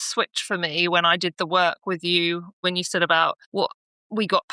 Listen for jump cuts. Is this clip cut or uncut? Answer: cut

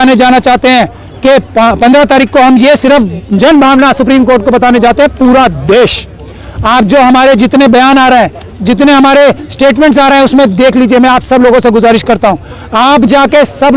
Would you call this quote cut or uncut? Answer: uncut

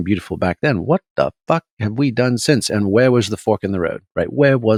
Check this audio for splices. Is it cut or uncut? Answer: uncut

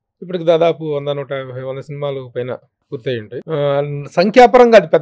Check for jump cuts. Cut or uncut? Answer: uncut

